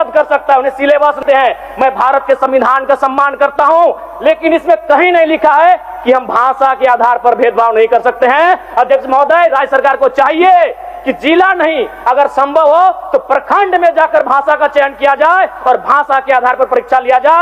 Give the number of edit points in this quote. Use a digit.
1